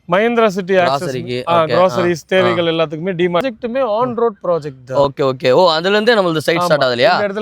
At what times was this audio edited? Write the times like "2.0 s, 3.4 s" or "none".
3.4 s